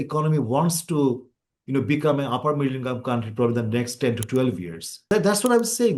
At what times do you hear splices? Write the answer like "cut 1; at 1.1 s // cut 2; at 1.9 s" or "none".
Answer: cut 1; at 5.1 s

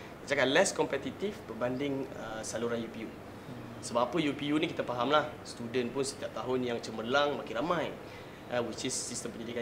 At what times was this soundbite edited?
none

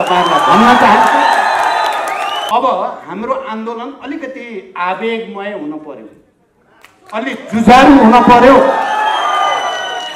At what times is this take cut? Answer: cut 1; at 2.5 s

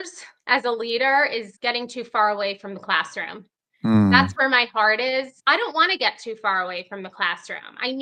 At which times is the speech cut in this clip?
cut 1; at 5.3 s

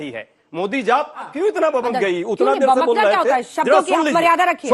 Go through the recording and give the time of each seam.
cut 1; at 1.3 s // cut 2; at 2.3 s

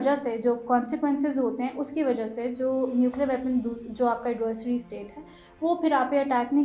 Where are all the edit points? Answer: none

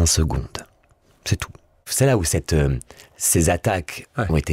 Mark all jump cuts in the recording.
cut 1; at 1.8 s

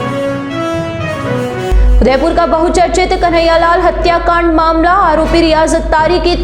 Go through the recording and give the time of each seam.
cut 1; at 1.6 s

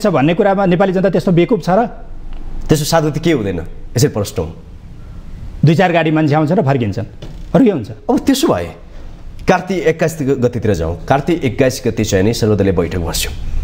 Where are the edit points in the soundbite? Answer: none

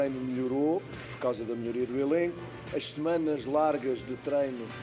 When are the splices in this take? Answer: none

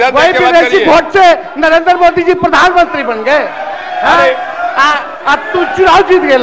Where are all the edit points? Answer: none

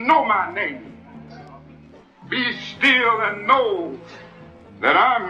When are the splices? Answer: none

